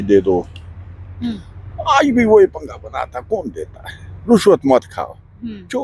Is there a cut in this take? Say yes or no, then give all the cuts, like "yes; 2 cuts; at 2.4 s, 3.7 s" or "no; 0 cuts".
no; 0 cuts